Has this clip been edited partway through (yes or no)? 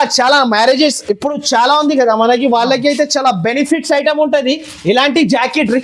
no